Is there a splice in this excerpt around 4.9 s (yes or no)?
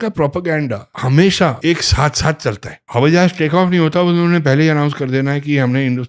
no